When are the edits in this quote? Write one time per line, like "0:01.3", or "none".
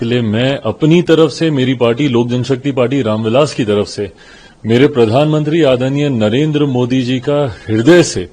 none